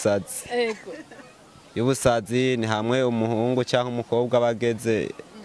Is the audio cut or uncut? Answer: uncut